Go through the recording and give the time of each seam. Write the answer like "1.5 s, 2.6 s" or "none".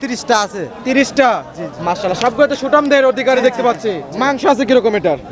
4.1 s